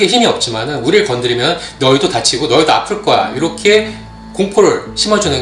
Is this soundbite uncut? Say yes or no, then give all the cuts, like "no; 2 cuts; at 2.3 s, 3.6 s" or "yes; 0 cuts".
yes; 0 cuts